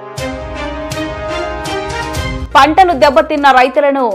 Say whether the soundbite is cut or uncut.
cut